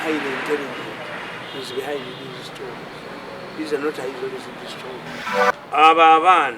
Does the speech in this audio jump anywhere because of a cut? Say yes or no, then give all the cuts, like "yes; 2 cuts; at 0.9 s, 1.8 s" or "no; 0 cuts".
yes; 1 cut; at 5.2 s